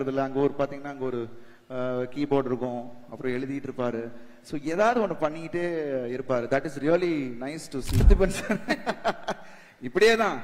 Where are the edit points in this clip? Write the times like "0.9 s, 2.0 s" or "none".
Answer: 8.0 s